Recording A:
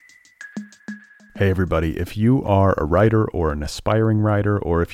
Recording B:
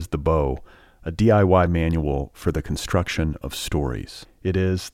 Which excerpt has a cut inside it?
A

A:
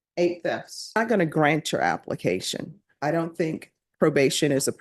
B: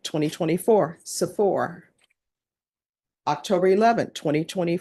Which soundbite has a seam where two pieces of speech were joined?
A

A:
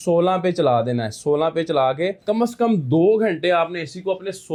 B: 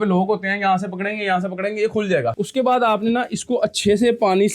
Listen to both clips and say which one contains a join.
B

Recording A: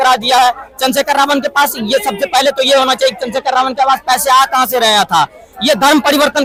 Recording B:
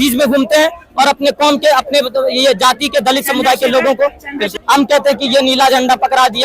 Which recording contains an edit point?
B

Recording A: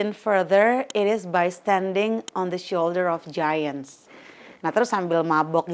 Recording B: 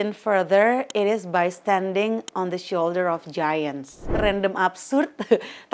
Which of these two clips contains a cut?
B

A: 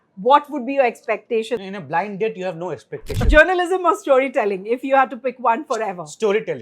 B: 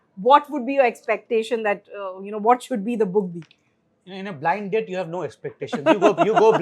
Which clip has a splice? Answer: A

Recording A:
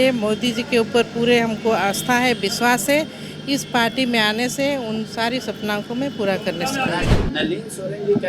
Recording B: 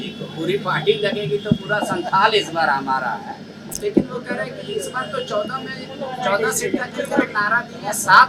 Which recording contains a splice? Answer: A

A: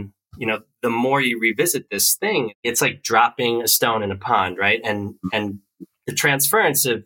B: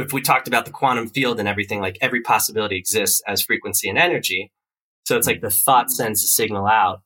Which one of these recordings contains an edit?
A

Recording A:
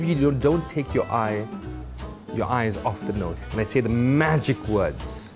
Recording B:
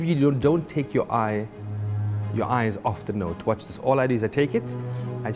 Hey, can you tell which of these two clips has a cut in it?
A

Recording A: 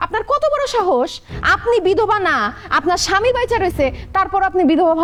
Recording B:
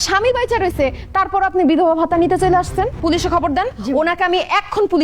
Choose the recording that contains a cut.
B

